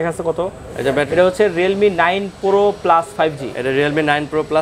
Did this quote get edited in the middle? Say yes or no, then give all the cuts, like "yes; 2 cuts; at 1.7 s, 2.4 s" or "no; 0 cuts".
yes; 1 cut; at 1.1 s